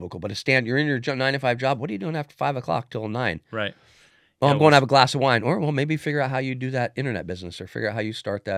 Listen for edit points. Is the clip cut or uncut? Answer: uncut